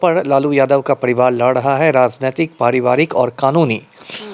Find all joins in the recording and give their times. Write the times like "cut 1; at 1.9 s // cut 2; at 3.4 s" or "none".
none